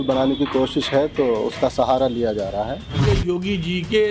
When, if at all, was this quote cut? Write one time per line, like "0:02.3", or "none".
0:03.0